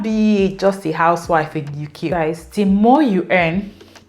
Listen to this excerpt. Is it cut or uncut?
cut